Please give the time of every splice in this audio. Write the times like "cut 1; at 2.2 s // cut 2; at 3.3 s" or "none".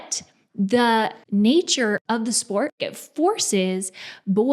cut 1; at 1.2 s // cut 2; at 2.0 s // cut 3; at 2.9 s